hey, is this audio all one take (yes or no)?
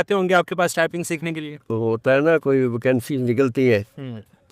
no